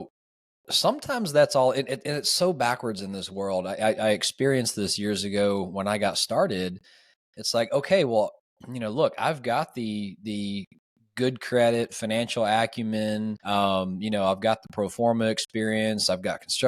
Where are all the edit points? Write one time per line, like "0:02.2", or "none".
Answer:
0:13.4